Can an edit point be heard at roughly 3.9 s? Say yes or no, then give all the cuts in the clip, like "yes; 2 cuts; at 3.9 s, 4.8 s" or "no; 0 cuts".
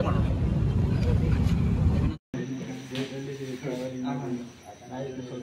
no; 1 cut; at 2.1 s